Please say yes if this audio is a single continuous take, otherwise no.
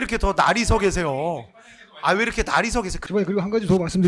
no